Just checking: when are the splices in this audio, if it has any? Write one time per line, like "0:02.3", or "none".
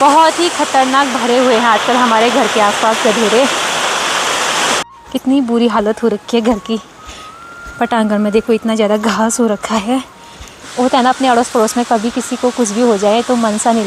0:04.9
0:10.5